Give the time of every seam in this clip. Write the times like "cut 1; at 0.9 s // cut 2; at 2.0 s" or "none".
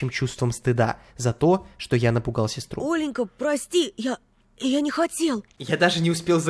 cut 1; at 5.5 s